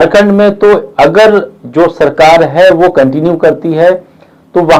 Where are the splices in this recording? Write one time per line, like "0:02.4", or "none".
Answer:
none